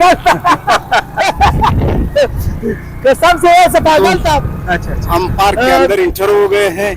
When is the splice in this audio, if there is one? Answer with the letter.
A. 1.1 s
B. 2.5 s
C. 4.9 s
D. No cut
C